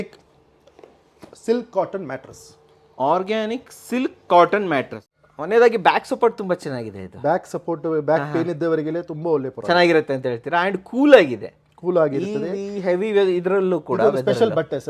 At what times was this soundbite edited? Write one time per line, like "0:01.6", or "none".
0:05.0